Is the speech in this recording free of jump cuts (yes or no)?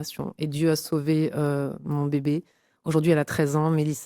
yes